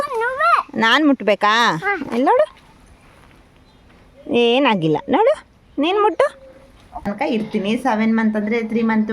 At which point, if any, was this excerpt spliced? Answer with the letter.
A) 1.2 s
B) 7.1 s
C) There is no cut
B